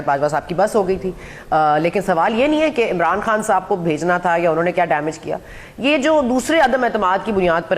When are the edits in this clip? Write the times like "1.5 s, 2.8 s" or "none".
none